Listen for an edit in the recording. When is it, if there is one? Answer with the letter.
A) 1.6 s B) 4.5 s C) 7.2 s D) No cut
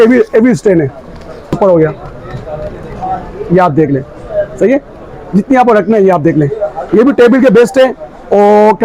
A